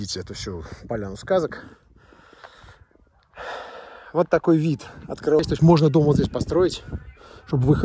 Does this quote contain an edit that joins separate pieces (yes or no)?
yes